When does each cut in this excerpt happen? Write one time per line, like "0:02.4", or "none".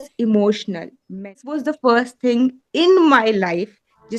0:01.3

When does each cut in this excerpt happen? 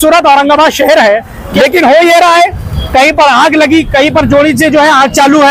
0:01.4

